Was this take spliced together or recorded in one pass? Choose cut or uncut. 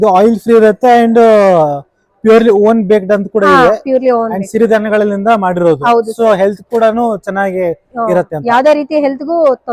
uncut